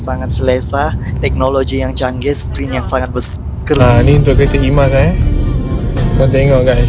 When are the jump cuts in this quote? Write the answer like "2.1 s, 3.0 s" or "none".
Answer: 3.8 s